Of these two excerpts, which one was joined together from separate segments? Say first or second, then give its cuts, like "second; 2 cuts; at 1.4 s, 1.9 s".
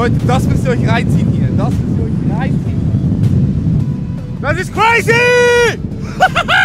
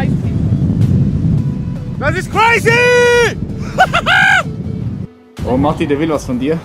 second; 1 cut; at 5.2 s